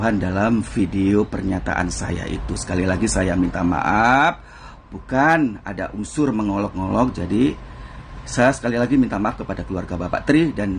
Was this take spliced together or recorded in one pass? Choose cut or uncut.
uncut